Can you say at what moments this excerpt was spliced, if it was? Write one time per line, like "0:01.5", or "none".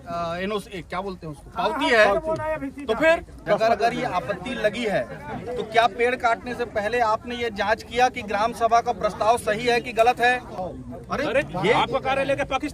0:03.3
0:10.5